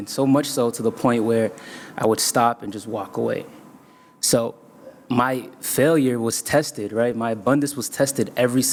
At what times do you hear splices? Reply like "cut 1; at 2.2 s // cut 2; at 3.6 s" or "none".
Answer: none